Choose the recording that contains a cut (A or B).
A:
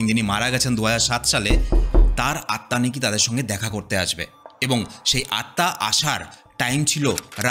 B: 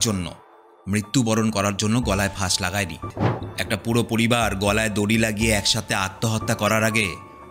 B